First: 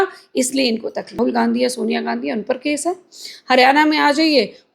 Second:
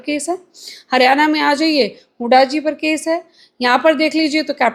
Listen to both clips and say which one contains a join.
first; 1 cut; at 1.2 s

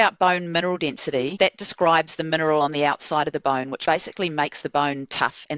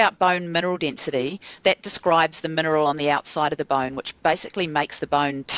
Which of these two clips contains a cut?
first; 2 cuts; at 1.3 s, 3.7 s

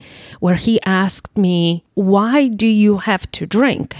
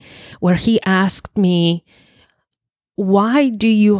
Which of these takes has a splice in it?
first; 1 cut; at 1.8 s

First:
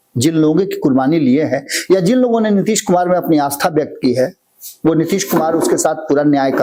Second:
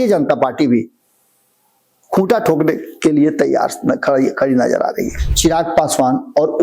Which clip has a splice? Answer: second; 1 cut; at 5.2 s

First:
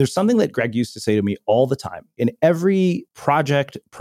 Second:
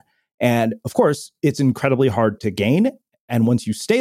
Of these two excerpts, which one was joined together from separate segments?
first; 2 cuts; at 2.1 s, 3.1 s

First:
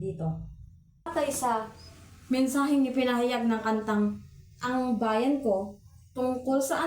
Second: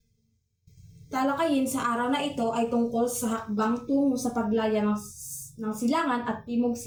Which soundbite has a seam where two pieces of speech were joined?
first; 1 cut; at 1.1 s

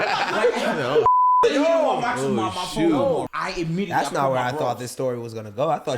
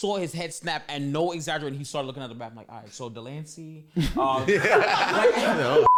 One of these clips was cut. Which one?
first; 1 cut; at 3.3 s

